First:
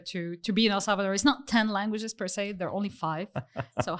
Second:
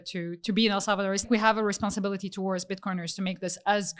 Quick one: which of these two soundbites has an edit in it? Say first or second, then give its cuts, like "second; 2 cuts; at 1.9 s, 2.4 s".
second; 1 cut; at 1.2 s